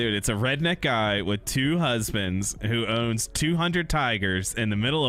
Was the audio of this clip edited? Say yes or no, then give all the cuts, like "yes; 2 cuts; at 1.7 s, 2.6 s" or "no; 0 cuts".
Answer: no; 0 cuts